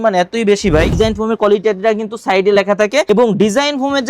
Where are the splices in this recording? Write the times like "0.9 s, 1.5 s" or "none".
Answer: 1.0 s